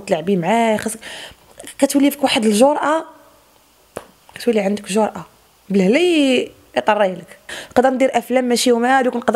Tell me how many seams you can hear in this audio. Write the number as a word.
one